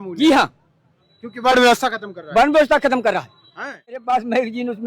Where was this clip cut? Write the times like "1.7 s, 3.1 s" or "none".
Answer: 3.9 s